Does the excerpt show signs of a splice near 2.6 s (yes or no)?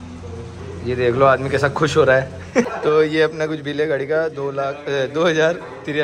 yes